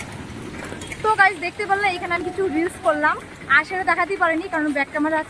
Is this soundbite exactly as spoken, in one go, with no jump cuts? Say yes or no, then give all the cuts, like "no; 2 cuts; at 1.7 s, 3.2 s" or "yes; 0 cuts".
yes; 0 cuts